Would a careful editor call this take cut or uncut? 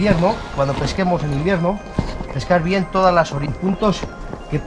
cut